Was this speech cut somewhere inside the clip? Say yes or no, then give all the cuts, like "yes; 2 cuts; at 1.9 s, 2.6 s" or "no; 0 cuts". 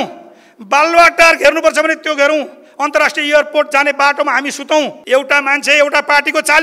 yes; 1 cut; at 5.0 s